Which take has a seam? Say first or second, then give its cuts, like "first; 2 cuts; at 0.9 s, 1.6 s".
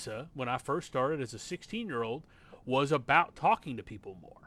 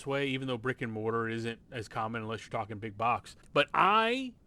second; 1 cut; at 3.4 s